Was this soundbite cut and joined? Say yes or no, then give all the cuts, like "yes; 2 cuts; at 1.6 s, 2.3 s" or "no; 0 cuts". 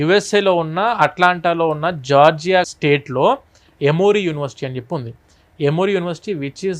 yes; 1 cut; at 2.7 s